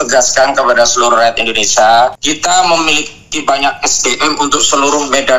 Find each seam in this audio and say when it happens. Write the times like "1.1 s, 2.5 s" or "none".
2.3 s